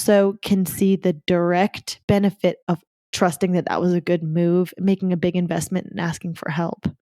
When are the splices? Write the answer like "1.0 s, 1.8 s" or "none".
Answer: 3.0 s